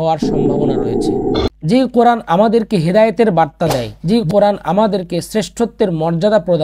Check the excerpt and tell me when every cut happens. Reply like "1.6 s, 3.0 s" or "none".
3.9 s